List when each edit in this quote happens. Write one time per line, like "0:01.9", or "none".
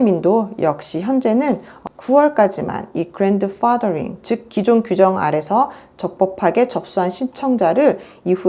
none